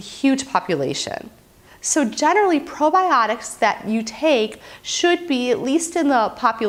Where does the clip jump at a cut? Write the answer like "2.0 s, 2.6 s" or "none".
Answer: none